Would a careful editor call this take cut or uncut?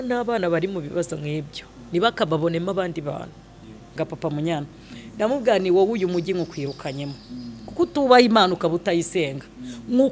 cut